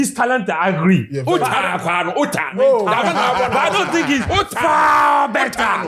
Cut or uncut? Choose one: uncut